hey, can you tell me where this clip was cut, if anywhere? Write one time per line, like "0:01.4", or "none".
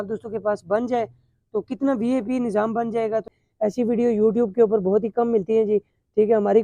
0:03.3